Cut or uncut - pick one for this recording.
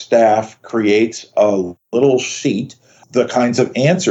cut